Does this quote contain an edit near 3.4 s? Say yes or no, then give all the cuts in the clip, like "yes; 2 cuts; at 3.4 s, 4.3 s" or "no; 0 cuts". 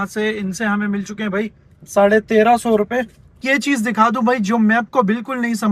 yes; 1 cut; at 3.4 s